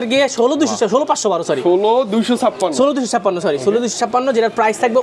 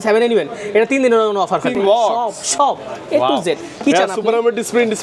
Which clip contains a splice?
second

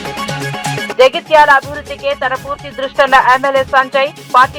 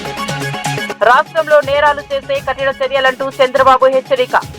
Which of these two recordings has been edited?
second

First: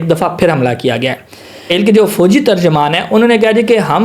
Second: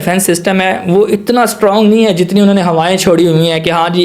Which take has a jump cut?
first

